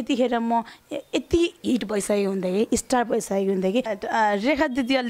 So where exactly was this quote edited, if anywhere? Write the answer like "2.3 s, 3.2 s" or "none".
3.9 s